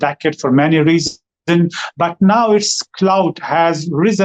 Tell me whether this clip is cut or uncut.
uncut